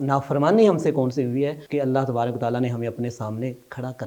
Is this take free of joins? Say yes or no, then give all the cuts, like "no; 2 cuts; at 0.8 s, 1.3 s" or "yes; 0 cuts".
no; 1 cut; at 1.6 s